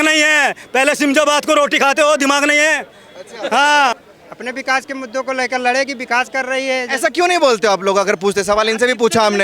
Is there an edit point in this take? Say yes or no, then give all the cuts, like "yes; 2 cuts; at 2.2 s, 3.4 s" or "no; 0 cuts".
yes; 1 cut; at 4.1 s